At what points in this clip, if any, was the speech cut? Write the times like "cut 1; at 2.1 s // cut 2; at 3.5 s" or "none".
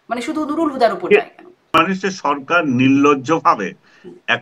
cut 1; at 1.8 s